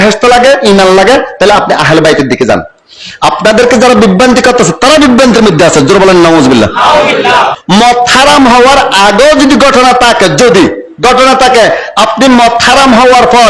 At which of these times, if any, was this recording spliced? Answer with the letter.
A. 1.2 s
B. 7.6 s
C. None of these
B